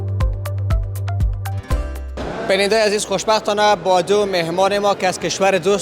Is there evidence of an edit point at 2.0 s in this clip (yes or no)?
yes